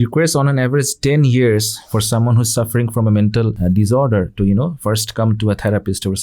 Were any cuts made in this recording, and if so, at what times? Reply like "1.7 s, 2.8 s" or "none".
3.6 s